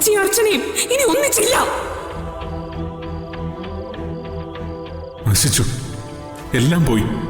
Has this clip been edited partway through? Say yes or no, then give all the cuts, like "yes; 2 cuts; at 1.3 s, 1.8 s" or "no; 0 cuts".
yes; 1 cut; at 5.2 s